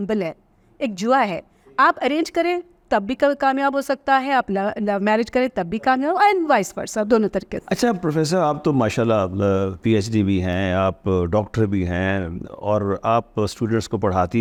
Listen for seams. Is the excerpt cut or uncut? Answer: uncut